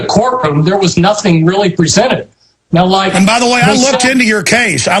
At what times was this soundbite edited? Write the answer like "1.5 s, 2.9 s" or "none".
4.1 s

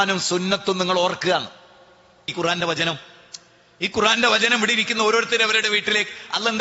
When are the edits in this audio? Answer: 2.3 s

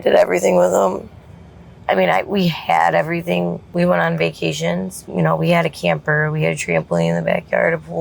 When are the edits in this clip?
1.7 s, 3.6 s, 5.0 s

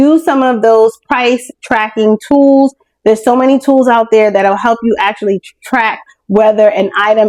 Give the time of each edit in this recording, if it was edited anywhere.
none

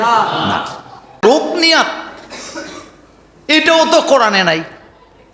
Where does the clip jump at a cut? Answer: 1.2 s

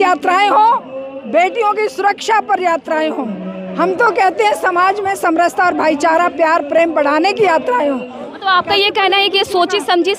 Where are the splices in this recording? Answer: 8.2 s

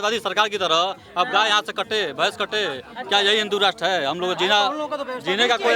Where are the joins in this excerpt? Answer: none

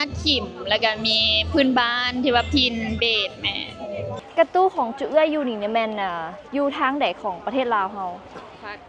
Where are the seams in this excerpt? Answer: 4.2 s

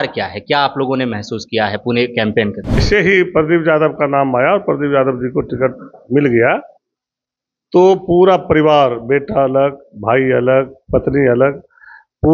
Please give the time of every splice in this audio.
2.8 s

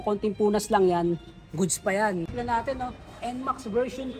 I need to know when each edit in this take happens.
2.3 s

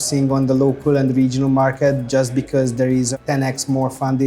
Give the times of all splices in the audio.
3.1 s

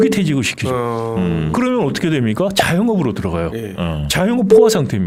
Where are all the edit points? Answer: none

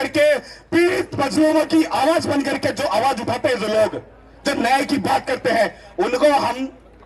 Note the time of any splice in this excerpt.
none

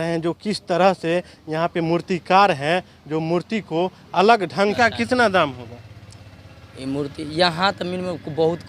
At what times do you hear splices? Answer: 4.8 s

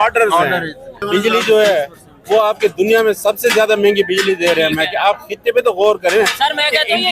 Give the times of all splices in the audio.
1.0 s

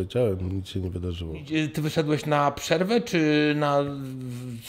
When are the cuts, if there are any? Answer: 1.4 s

